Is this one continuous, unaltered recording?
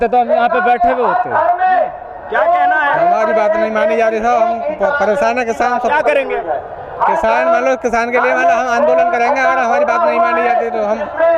yes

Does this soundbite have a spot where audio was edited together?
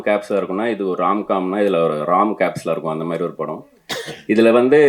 no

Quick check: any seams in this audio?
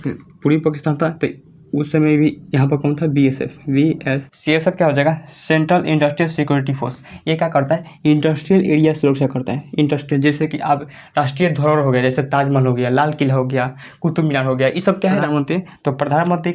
yes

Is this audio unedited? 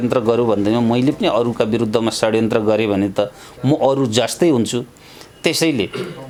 yes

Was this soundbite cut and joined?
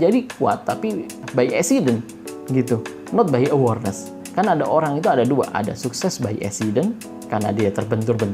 yes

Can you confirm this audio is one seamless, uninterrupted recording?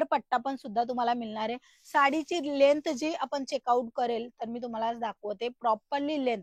yes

